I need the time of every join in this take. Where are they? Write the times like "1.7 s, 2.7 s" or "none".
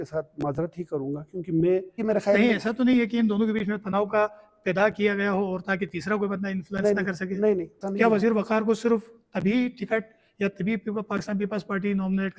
2.0 s, 7.8 s